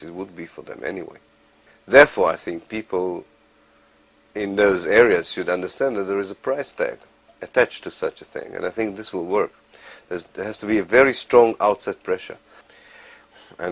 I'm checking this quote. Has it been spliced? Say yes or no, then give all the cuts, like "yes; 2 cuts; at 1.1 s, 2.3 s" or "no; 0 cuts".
no; 0 cuts